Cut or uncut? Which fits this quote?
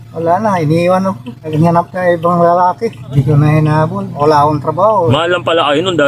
cut